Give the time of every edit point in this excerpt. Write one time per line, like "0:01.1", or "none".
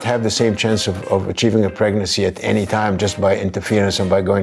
none